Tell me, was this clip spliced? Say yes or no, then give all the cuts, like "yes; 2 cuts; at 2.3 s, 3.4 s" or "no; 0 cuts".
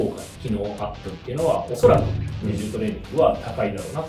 no; 0 cuts